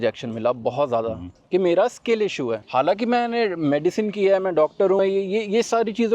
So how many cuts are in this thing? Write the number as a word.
one